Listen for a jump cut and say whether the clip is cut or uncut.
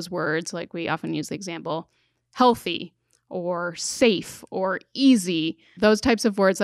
cut